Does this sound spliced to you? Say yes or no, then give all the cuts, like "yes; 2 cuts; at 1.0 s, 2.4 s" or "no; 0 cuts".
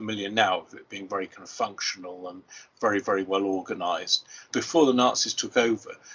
yes; 1 cut; at 4.5 s